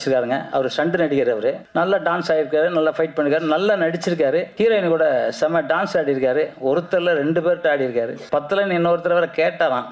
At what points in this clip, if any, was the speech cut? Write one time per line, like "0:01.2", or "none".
0:01.6